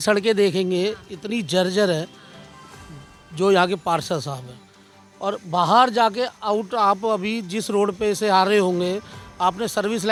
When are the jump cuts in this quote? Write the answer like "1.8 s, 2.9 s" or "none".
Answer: none

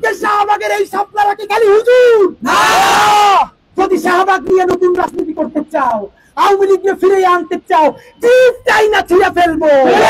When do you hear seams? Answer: none

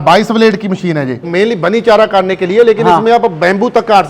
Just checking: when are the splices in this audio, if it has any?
1.2 s

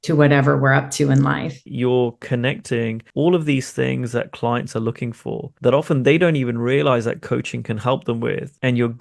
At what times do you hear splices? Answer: 1.6 s

